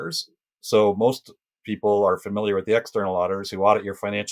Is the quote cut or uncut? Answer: uncut